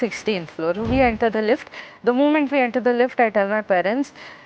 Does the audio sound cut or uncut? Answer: uncut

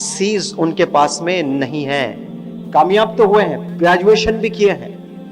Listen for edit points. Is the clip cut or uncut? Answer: uncut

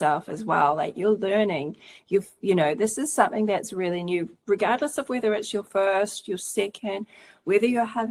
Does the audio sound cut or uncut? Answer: uncut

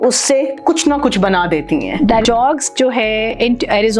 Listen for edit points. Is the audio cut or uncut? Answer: cut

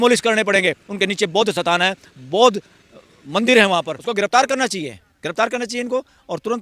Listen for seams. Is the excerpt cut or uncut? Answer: cut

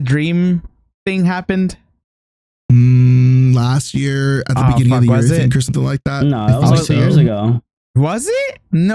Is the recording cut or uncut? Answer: uncut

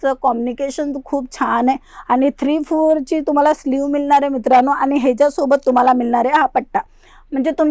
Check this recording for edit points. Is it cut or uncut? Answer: uncut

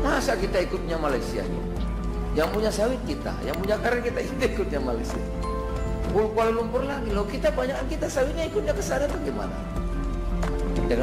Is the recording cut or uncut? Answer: uncut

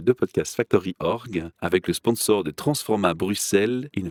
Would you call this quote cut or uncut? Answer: uncut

